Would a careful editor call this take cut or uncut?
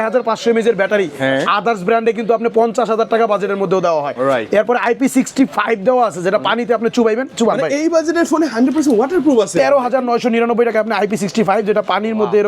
uncut